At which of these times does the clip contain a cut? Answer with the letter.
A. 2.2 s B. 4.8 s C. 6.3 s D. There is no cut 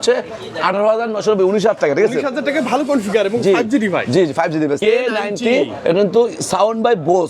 B